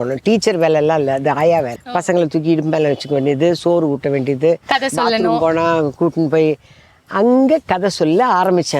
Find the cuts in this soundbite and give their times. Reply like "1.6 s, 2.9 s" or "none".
1.8 s